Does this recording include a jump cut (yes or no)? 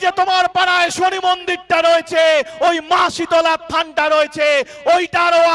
no